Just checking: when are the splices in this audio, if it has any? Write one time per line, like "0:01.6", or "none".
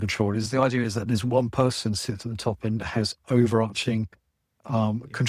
none